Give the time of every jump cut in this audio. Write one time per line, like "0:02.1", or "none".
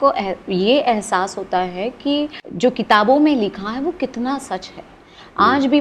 0:02.4